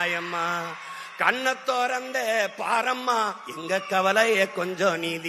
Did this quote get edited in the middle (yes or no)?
no